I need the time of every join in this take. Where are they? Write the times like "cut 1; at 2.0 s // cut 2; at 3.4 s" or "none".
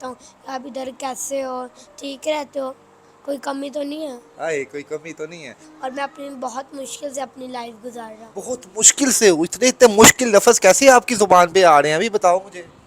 cut 1; at 5.6 s